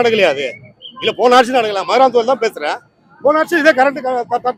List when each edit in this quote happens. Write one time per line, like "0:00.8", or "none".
none